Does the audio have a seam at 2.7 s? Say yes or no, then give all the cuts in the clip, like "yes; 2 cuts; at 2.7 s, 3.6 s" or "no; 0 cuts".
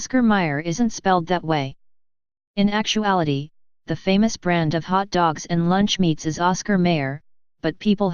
yes; 1 cut; at 2.7 s